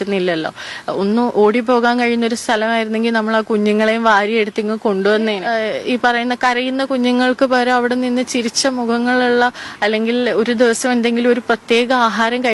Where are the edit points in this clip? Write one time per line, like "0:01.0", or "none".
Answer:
0:05.4